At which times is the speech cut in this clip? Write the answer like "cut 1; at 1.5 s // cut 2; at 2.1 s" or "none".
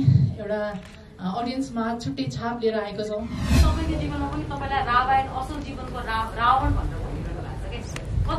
cut 1; at 3.6 s